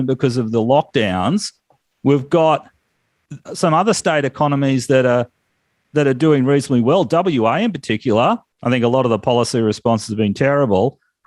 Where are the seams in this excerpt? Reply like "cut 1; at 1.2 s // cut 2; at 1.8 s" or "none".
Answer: cut 1; at 8.5 s